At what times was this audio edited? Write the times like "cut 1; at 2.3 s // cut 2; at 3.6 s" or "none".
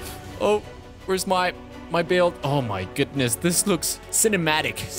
cut 1; at 4.1 s

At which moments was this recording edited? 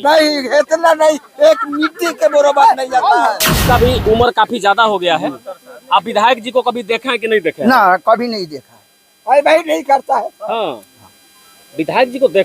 cut 1; at 3.6 s

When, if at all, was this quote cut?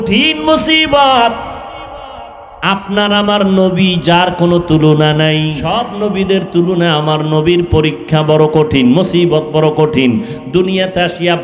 cut 1; at 5.6 s

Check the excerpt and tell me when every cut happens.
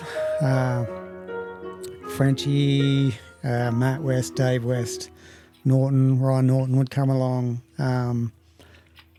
none

